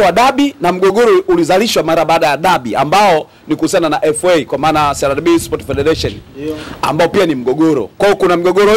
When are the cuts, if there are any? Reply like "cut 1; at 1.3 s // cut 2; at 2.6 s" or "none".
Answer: none